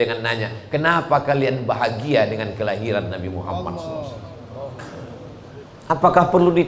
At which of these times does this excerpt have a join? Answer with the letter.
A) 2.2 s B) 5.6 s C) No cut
B